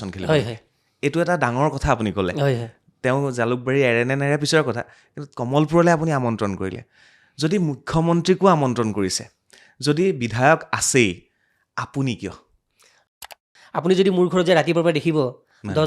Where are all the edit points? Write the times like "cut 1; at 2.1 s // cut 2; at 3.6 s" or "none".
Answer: cut 1; at 13.2 s